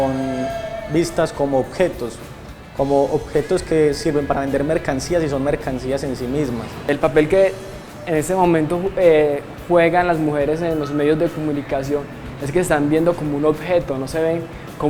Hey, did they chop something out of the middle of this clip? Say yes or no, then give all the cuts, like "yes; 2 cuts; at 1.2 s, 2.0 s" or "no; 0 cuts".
yes; 1 cut; at 6.7 s